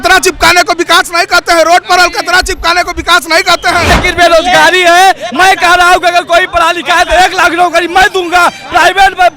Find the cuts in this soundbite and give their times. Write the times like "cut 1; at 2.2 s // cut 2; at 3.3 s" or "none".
cut 1; at 4.0 s